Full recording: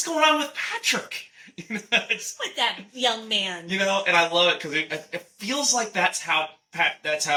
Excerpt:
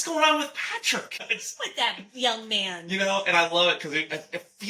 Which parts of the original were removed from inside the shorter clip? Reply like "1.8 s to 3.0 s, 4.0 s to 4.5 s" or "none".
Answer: 1.4 s to 2.2 s